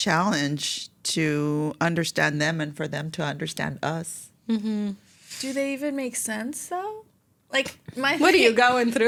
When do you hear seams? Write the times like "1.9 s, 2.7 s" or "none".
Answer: none